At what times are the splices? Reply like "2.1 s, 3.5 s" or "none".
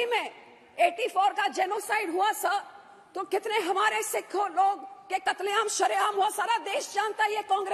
none

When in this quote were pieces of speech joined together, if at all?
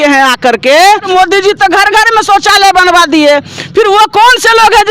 1.1 s

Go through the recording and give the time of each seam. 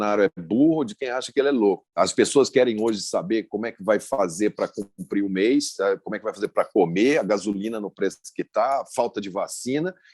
2.0 s

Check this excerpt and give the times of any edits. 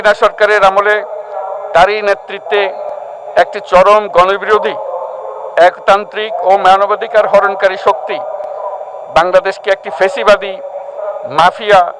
none

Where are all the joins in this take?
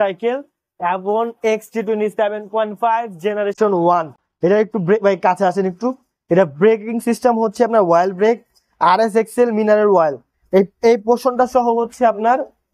none

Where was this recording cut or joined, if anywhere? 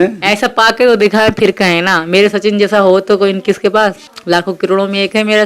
4.1 s

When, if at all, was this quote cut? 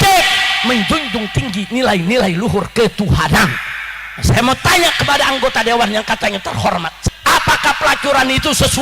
7.0 s

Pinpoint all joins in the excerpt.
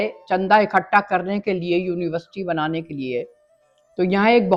none

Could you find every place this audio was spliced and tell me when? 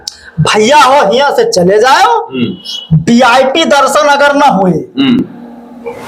none

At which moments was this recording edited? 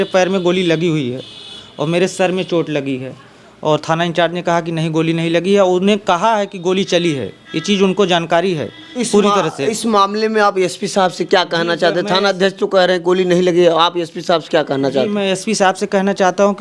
none

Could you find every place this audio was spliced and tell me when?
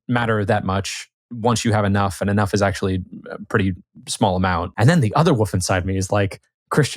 4.7 s

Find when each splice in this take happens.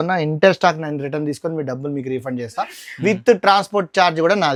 none

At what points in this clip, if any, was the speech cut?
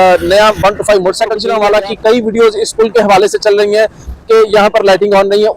1.4 s

